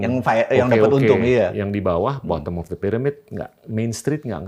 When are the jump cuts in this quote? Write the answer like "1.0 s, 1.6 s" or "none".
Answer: none